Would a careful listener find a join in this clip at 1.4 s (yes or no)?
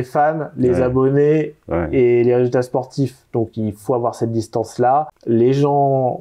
no